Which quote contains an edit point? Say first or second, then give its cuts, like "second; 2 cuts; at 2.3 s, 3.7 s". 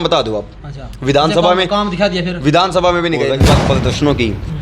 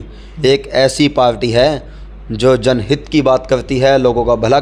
first; 1 cut; at 3.6 s